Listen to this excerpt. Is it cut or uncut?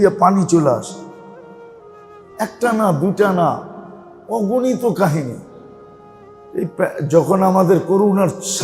cut